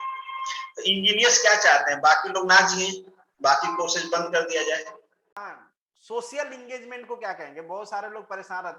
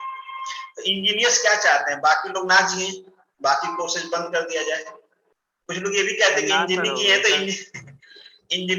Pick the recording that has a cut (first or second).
first